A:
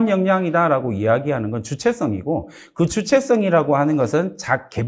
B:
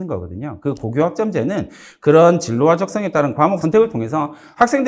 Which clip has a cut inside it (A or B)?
B